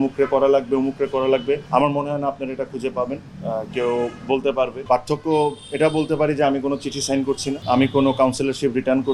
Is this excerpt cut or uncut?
cut